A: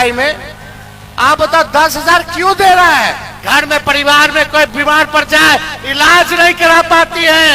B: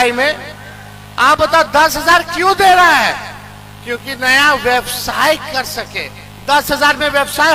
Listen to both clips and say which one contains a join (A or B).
A